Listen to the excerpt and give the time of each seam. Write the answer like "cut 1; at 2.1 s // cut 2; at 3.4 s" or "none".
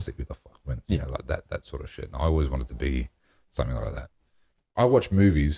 cut 1; at 4.7 s